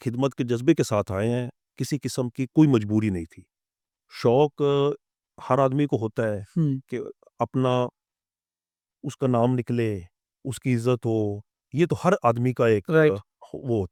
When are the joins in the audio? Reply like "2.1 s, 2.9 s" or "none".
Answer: none